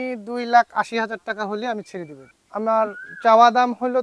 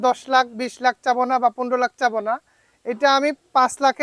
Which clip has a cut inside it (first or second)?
first